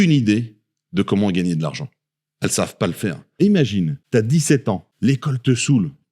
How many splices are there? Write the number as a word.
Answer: three